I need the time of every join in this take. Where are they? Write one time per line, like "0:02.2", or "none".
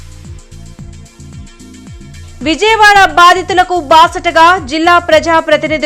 0:01.2

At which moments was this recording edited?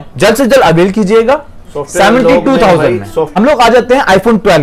0:03.3

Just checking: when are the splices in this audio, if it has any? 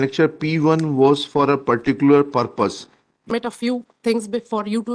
0:03.3

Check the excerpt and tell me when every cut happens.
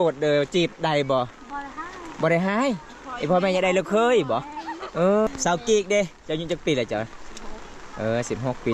0:05.3

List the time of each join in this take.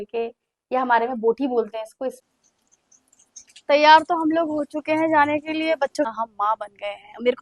0:02.3
0:06.1

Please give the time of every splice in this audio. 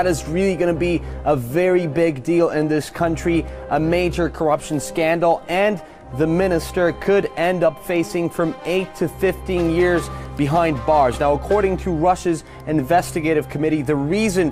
0:03.3

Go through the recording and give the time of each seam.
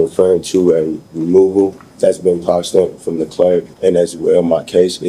0:01.8
0:03.7

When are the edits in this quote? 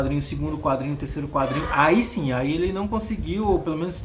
none

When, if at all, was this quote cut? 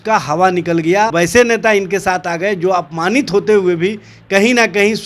0:01.1

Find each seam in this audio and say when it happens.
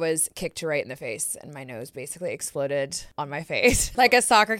0:03.6

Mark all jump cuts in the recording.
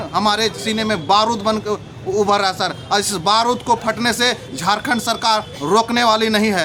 none

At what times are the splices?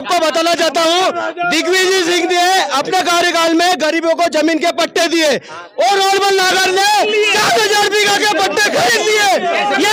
none

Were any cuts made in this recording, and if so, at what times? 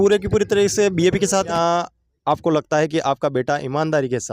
0:01.5

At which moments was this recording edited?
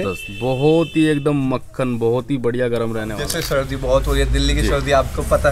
0:03.1

